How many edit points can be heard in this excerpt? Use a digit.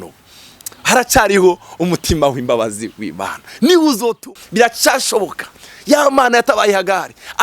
1